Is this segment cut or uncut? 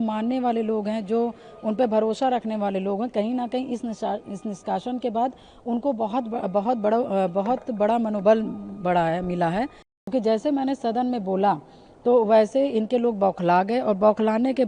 cut